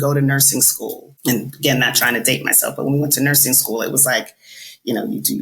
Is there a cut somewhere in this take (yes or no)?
yes